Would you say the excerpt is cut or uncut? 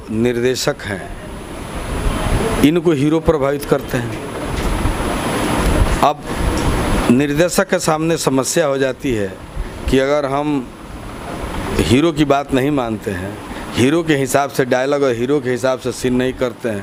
uncut